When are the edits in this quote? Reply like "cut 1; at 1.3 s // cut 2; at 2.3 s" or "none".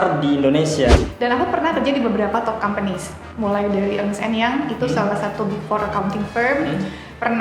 cut 1; at 1.0 s